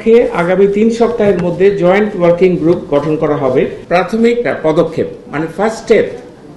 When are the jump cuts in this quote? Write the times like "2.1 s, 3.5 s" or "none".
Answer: 3.8 s